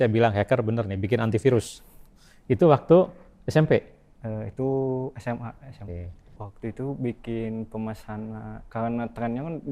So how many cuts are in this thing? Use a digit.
1